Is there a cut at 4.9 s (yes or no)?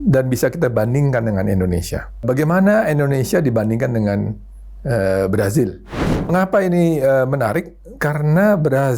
no